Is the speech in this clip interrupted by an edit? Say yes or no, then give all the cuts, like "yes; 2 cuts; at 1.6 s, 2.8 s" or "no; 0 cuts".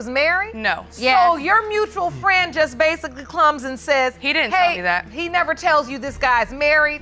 no; 0 cuts